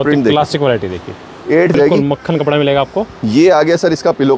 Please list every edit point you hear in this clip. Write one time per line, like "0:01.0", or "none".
0:01.7